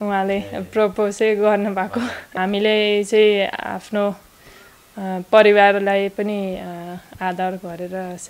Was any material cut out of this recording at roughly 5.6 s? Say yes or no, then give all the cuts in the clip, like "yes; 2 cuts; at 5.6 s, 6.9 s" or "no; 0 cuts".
no; 1 cut; at 2.3 s